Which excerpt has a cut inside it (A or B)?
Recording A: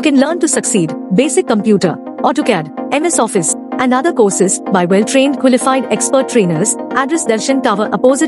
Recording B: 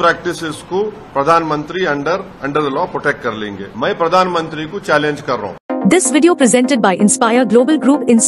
B